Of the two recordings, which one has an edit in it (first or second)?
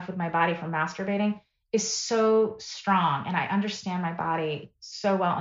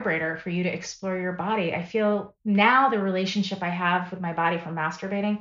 second